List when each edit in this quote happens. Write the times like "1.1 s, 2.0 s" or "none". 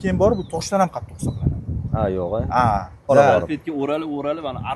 3.1 s